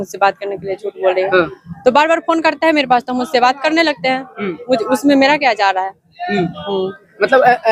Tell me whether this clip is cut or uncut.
uncut